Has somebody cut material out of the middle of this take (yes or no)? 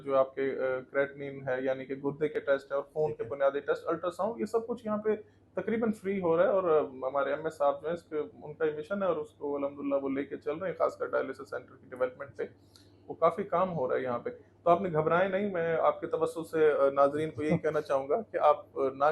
no